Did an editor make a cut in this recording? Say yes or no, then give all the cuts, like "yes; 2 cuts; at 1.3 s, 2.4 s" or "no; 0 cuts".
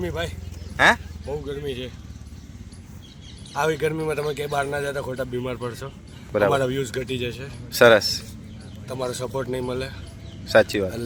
no; 0 cuts